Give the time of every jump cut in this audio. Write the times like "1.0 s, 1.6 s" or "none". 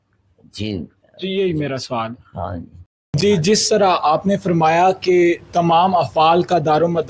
3.0 s

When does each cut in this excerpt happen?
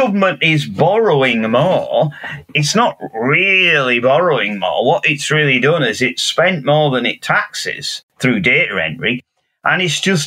8.0 s

